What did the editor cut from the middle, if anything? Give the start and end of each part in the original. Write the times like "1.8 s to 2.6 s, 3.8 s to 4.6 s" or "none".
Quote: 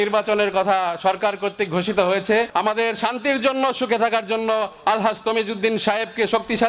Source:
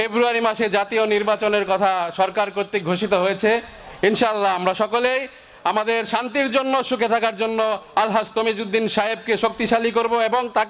3.6 s to 5.6 s